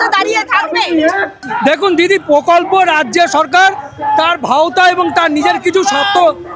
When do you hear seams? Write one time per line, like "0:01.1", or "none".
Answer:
0:01.4